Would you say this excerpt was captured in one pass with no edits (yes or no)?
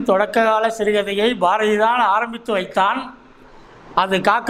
yes